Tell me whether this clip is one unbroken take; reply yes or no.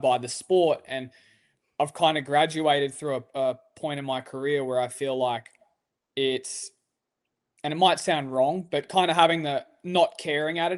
yes